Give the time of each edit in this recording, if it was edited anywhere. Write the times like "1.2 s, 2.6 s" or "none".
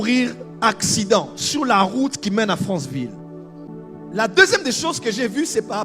3.7 s

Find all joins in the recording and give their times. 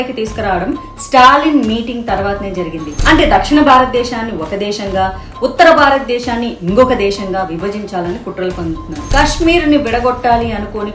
2.9 s

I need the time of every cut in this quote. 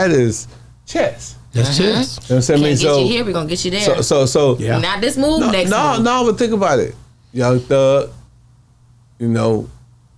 none

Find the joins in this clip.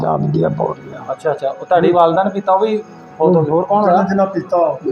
none

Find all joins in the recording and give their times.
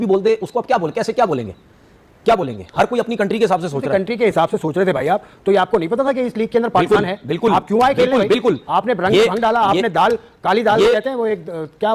none

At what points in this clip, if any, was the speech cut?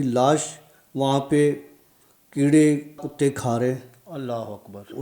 3.1 s

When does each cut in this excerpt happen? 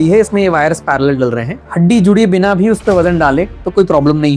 1.6 s

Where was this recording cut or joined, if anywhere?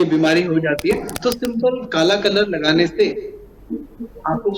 1.1 s

